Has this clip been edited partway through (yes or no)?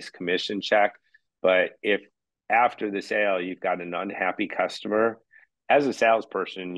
no